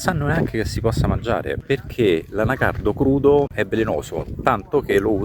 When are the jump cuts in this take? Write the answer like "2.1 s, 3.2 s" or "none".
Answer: 3.6 s